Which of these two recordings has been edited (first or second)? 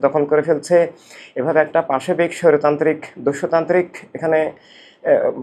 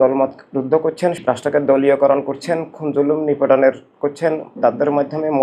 second